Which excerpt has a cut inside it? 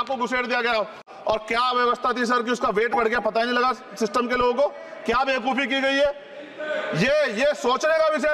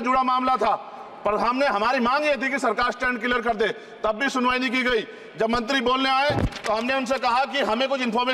first; 1 cut; at 1.0 s

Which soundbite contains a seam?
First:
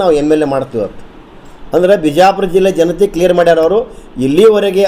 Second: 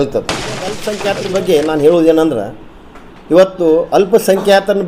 second; 1 cut; at 0.9 s

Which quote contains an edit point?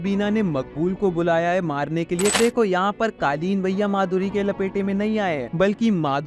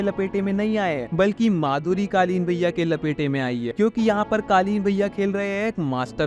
first; 1 cut; at 2.4 s

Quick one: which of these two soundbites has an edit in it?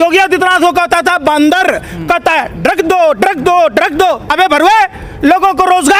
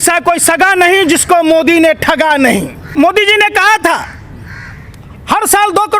second; 1 cut; at 2.8 s

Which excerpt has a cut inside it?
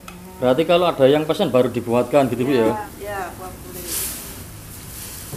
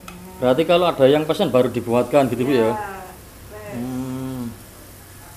first; 2 cuts; at 2.9 s, 4.4 s

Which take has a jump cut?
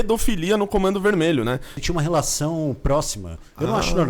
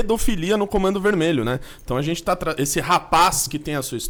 first; 1 cut; at 1.8 s

